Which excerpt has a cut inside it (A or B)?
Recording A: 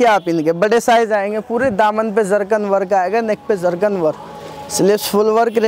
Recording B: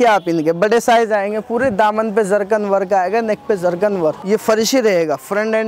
B